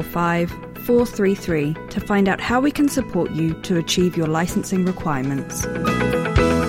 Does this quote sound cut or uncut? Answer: cut